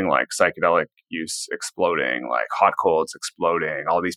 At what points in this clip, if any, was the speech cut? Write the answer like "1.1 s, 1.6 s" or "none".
none